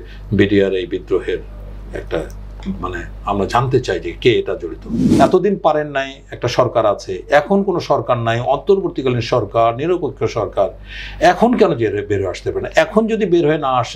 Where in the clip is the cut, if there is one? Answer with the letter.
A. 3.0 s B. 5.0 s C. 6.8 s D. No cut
B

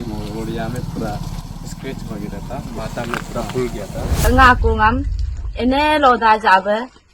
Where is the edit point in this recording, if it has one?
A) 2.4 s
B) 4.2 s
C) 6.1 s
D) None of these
B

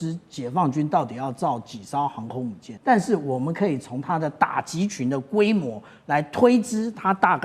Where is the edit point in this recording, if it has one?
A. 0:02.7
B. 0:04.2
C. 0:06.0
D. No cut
A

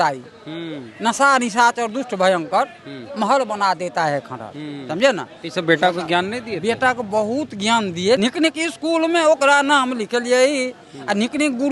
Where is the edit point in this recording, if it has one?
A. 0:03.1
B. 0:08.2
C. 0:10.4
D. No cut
B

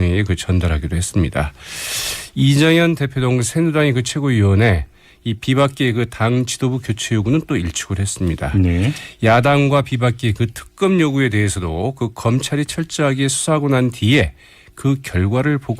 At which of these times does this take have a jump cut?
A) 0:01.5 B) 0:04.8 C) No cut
A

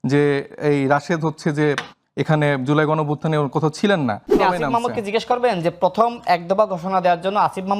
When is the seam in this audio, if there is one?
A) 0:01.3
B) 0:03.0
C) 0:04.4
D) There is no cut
C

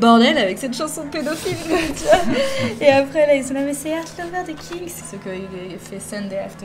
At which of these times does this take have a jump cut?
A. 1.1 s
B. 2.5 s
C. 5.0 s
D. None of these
C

